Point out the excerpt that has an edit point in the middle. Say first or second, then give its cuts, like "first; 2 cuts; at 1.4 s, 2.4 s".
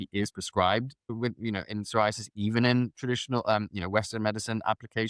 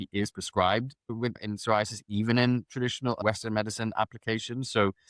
second; 2 cuts; at 1.4 s, 3.2 s